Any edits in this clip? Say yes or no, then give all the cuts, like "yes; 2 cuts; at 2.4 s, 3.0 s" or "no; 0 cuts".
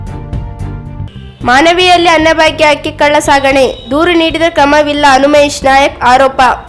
no; 0 cuts